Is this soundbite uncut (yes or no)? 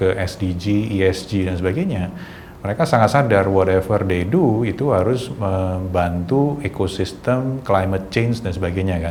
yes